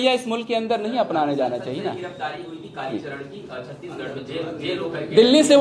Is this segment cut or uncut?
uncut